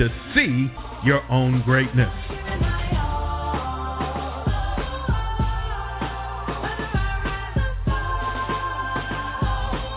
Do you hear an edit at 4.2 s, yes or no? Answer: no